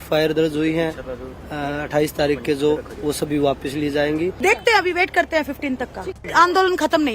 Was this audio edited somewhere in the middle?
yes; 2 cuts; at 4.4 s, 6.2 s

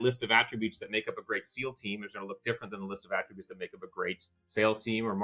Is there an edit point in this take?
yes; 1 cut; at 4.3 s

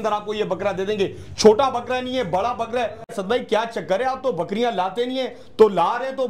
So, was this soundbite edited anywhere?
yes; 1 cut; at 3.0 s

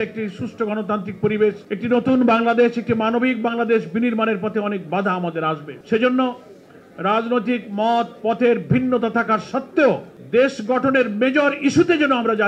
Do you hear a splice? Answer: yes; 3 cuts; at 1.7 s, 5.7 s, 10.1 s

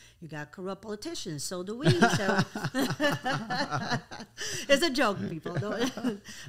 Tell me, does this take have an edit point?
no; 0 cuts

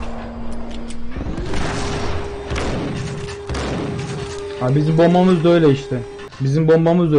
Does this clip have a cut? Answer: no; 0 cuts

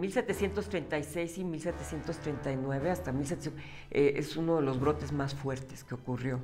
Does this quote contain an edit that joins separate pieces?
no; 0 cuts

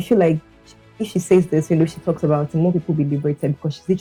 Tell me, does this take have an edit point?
no; 0 cuts

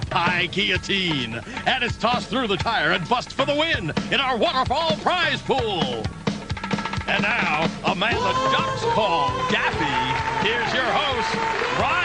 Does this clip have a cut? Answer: yes; 1 cut; at 7.1 s

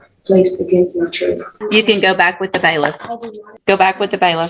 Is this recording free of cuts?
no; 2 cuts; at 1.5 s, 3.5 s

